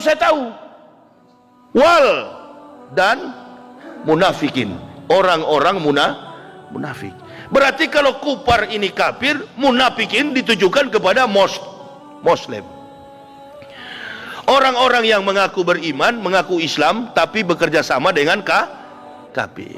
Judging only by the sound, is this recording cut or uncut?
uncut